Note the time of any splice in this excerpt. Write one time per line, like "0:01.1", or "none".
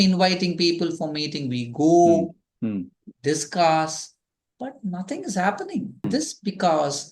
0:06.1